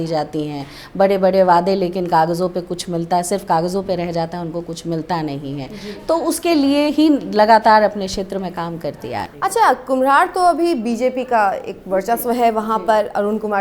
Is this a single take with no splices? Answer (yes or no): yes